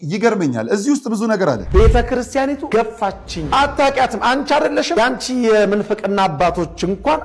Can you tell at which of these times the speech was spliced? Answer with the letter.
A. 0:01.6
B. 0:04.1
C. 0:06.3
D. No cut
A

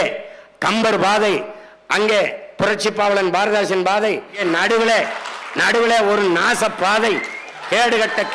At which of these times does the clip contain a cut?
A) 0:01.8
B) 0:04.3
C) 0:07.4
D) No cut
B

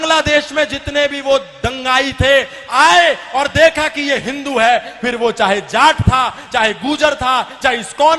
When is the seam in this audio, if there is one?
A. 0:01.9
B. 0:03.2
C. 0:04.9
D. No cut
D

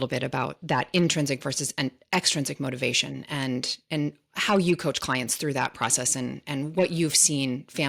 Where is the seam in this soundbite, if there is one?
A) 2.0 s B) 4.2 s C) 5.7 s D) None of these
D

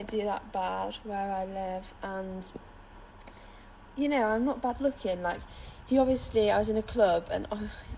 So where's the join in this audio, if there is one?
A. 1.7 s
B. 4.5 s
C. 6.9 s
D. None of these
B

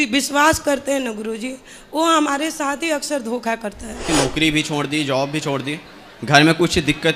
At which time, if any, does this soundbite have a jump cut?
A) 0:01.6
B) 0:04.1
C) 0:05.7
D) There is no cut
B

